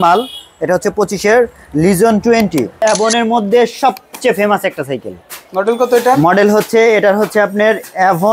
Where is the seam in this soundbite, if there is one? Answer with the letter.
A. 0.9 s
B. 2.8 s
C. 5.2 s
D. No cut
B